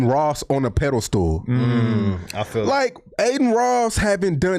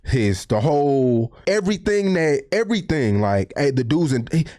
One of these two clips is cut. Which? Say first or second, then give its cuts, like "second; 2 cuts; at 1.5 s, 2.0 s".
second; 1 cut; at 1.3 s